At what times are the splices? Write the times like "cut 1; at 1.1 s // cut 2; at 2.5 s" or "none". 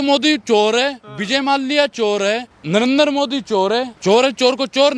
cut 1; at 2.5 s // cut 2; at 3.9 s